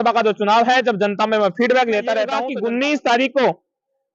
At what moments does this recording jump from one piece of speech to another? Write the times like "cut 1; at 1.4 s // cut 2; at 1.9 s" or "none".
cut 1; at 2.4 s